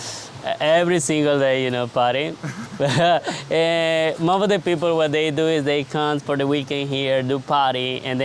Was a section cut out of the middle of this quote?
no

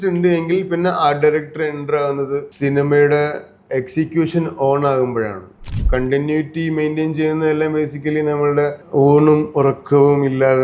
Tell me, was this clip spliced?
yes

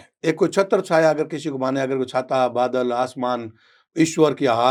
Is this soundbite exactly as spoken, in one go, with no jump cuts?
yes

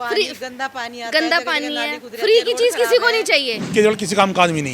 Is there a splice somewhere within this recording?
yes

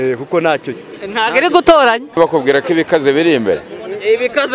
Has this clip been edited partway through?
yes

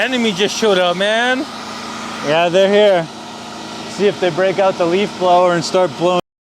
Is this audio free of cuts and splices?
yes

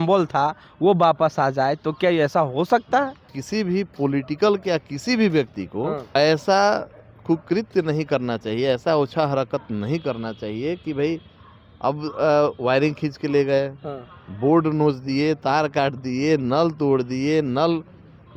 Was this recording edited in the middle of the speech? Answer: yes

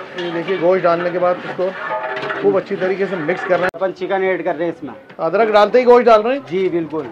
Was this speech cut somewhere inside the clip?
yes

